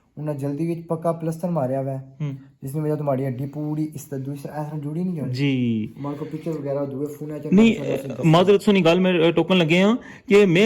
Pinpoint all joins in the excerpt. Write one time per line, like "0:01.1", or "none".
none